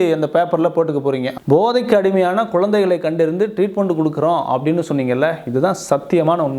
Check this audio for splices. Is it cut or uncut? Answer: cut